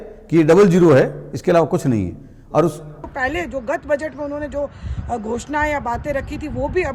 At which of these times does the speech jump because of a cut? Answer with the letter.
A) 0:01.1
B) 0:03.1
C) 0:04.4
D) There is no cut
B